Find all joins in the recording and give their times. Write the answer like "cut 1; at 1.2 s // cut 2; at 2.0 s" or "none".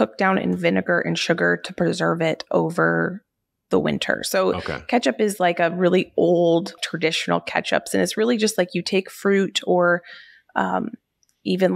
cut 1; at 6.8 s